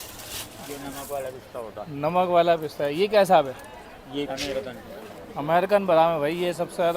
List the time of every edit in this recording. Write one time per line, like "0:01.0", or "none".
0:04.3